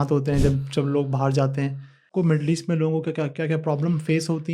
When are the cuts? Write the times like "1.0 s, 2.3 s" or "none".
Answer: 2.1 s